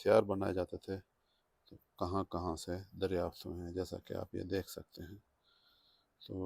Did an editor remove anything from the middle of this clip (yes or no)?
no